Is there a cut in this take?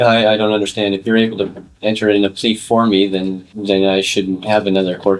no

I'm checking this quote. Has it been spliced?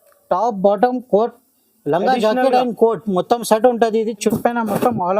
yes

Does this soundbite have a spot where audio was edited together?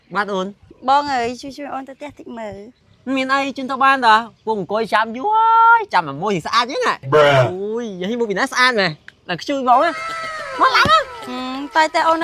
no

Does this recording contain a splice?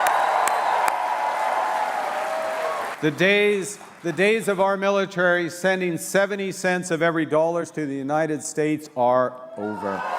yes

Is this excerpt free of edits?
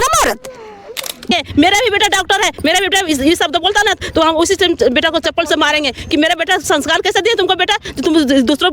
no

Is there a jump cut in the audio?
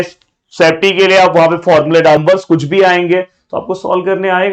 yes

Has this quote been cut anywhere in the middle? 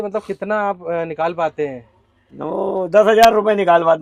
no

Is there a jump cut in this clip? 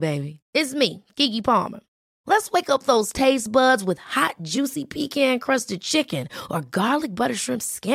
no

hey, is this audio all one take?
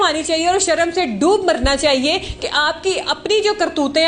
yes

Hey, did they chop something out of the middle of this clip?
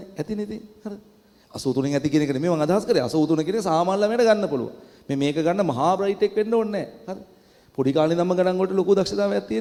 no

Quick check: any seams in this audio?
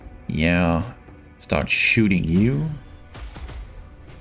no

